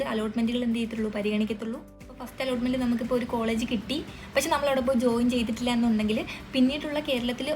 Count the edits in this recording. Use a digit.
1